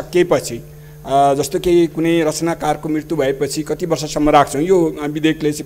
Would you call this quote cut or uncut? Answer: uncut